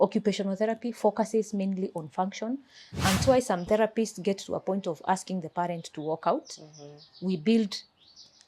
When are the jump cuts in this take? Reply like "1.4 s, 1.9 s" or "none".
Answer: 3.2 s